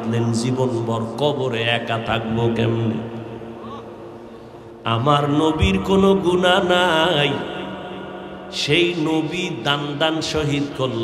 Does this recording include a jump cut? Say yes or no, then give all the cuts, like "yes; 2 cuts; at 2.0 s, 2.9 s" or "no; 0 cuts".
yes; 1 cut; at 4.8 s